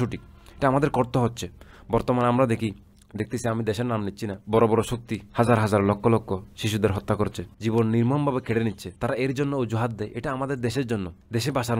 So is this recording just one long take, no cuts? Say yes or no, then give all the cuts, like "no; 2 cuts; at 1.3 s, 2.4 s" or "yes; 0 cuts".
no; 4 cuts; at 4.4 s, 5.2 s, 7.5 s, 8.9 s